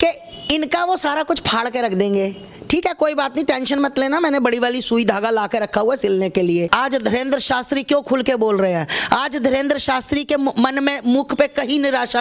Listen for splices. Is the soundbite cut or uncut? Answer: cut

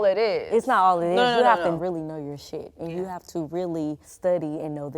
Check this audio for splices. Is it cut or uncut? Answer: cut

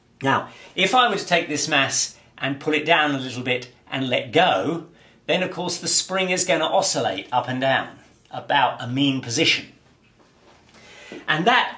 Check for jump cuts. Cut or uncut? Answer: uncut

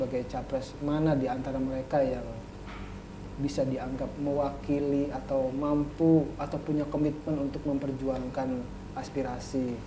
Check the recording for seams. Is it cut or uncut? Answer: uncut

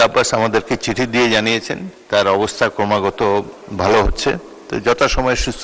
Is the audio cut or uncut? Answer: uncut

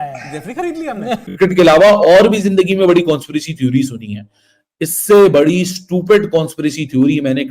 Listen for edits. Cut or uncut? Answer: cut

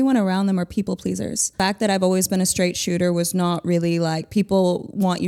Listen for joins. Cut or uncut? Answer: cut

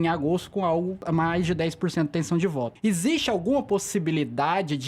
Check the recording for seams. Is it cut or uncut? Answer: cut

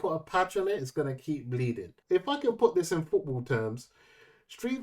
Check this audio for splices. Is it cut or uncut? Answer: cut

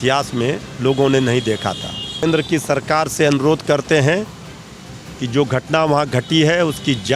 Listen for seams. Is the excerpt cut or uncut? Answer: cut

